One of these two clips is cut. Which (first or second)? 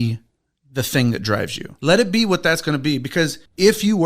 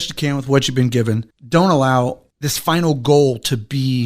first